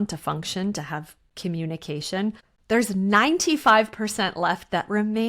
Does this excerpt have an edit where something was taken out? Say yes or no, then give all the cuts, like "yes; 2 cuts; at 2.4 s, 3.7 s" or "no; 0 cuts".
yes; 1 cut; at 2.5 s